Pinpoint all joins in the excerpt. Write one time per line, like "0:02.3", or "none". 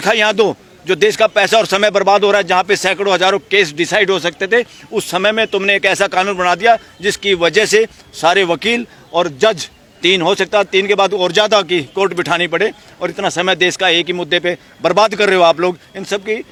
none